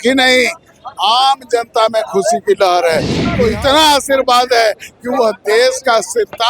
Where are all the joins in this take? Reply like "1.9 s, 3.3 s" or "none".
3.2 s